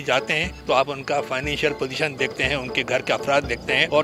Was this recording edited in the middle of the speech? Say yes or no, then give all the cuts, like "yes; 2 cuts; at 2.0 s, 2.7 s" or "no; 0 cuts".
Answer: no; 0 cuts